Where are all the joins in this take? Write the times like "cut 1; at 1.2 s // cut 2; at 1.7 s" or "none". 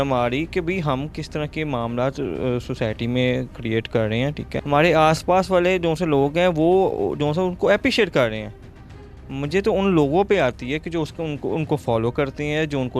none